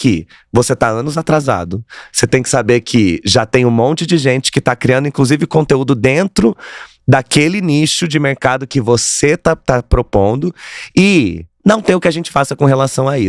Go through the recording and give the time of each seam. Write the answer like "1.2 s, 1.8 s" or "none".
none